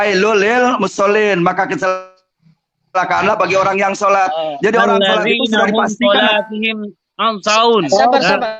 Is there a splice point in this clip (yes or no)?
no